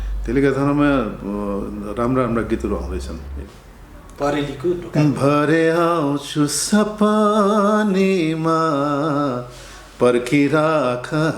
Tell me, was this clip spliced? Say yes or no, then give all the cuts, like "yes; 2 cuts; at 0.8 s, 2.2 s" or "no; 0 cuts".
yes; 1 cut; at 3.3 s